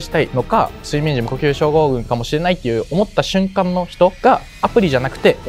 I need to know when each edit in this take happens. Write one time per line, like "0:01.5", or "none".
none